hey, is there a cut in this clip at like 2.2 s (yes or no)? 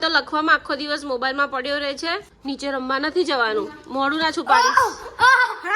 yes